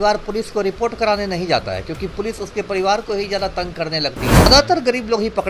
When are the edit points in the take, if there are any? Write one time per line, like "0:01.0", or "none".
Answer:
0:04.5